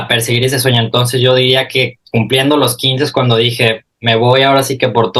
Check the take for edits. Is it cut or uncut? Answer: uncut